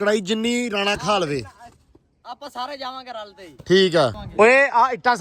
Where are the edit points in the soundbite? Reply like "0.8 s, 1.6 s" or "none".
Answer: 4.2 s